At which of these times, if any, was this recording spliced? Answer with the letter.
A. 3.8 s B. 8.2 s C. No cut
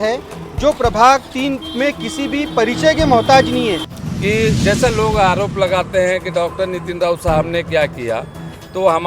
A